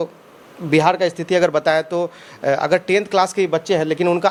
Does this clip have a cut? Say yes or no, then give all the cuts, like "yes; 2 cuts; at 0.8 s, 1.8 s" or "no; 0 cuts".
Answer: no; 0 cuts